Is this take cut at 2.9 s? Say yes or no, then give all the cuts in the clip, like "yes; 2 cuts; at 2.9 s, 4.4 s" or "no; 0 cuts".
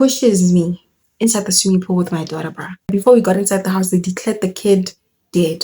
yes; 1 cut; at 2.9 s